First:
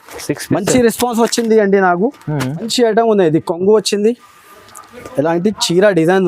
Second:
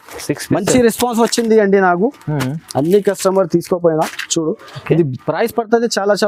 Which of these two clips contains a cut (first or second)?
first